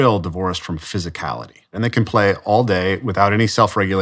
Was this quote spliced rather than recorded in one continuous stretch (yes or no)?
yes